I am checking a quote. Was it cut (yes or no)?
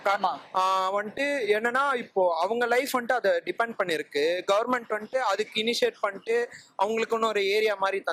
no